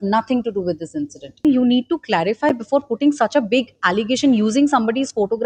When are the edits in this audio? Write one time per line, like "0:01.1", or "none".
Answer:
0:01.4